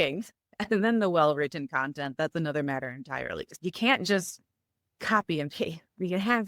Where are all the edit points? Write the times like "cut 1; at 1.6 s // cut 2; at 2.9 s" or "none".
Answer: cut 1; at 3.5 s